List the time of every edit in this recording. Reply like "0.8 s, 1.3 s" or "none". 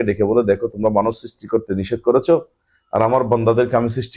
none